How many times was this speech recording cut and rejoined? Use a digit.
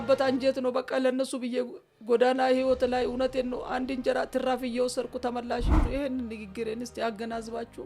1